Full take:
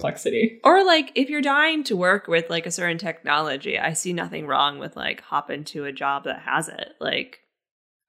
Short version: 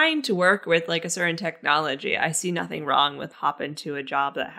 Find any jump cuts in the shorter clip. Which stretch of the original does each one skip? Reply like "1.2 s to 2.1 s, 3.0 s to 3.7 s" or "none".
4.9 s to 5.2 s